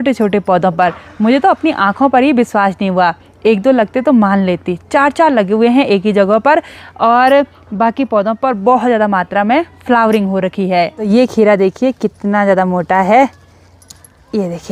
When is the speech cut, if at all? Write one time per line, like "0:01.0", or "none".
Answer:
none

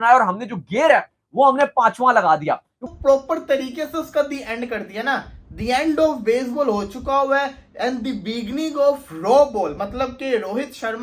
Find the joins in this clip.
0:02.8

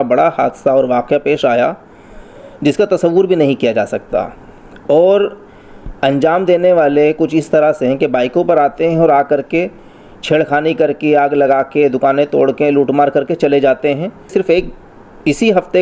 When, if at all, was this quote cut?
0:14.3

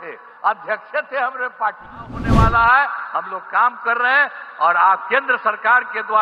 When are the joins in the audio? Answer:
0:02.2

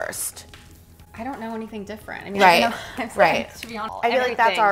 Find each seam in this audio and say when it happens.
0:03.8

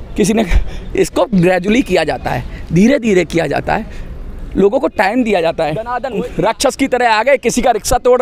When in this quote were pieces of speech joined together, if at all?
0:06.0

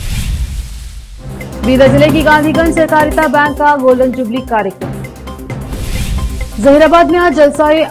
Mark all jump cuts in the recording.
0:01.2

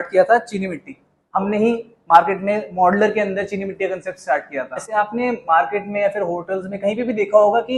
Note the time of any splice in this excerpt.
0:04.8

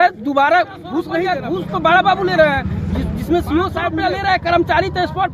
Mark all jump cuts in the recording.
0:01.2
0:03.9

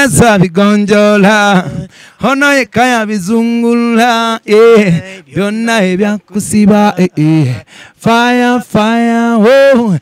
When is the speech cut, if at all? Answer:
none

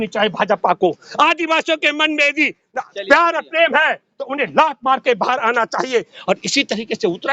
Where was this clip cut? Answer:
none

